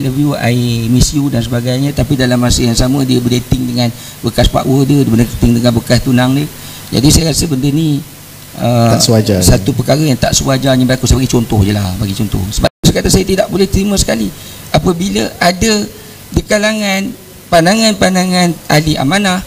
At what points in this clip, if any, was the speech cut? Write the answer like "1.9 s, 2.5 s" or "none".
12.8 s